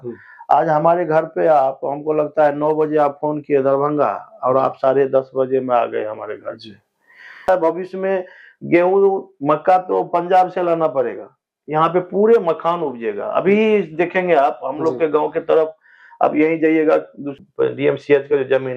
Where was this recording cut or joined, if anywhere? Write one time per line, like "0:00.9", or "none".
0:07.5
0:17.3